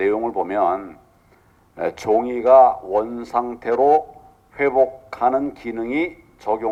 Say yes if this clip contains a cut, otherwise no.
no